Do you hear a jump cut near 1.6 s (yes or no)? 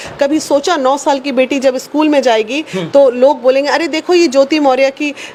no